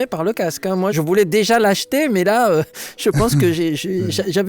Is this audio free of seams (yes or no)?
no